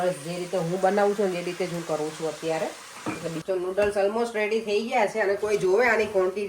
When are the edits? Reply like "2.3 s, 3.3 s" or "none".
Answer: 3.4 s